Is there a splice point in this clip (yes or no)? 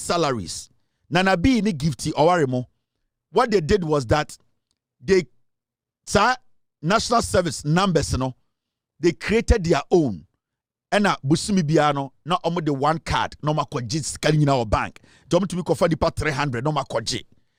no